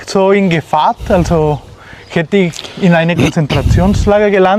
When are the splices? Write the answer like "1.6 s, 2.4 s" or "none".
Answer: none